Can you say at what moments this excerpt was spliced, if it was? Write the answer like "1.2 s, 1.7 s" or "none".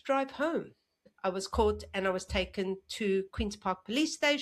1.1 s